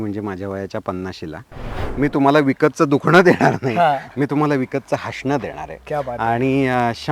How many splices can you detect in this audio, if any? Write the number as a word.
one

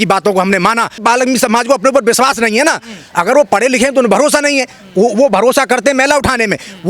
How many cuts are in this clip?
one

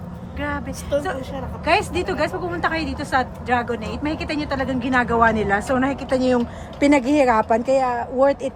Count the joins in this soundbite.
zero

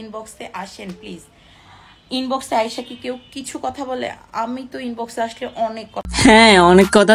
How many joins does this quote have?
one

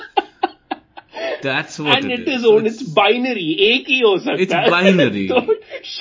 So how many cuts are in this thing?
zero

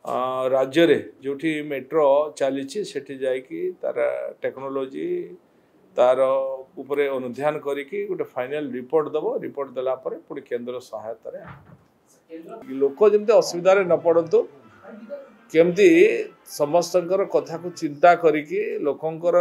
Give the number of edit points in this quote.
one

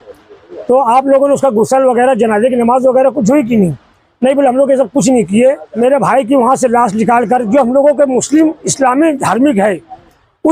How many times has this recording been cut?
one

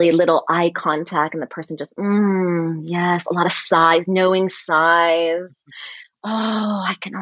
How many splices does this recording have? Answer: zero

